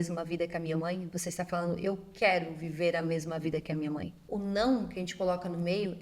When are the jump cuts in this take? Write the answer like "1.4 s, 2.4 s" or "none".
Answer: 4.2 s

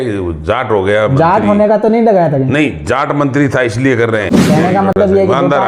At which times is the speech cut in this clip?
4.4 s

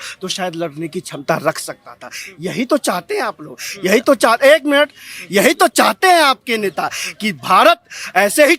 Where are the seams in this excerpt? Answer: none

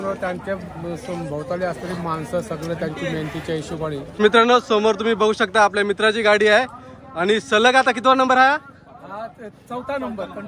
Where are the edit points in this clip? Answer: 4.2 s

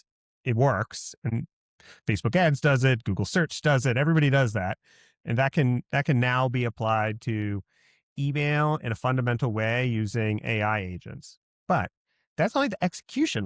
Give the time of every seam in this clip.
1.3 s

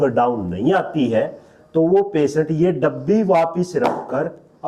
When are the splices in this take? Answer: none

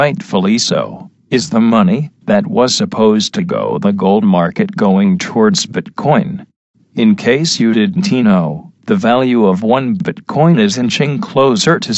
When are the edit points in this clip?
none

